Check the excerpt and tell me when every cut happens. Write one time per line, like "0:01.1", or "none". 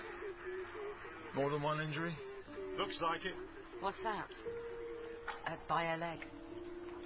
0:03.7